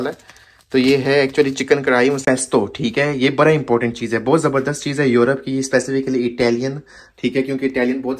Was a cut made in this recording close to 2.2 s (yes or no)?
yes